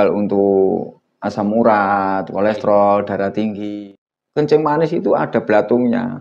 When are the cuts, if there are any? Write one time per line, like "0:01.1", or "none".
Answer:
0:03.7